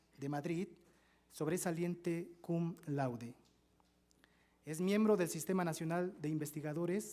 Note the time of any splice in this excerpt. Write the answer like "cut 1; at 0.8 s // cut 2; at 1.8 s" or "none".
cut 1; at 2.8 s